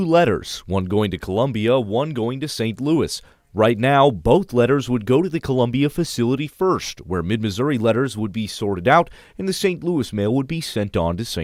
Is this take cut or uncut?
uncut